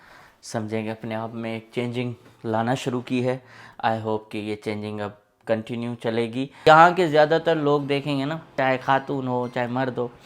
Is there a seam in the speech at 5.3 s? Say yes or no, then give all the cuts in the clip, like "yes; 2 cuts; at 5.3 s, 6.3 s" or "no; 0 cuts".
no; 2 cuts; at 6.5 s, 8.5 s